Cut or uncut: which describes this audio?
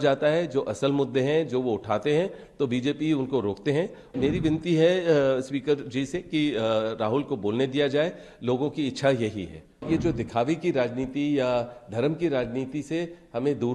cut